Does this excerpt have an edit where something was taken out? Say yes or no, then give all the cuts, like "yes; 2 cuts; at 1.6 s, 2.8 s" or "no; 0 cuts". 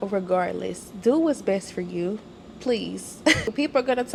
no; 0 cuts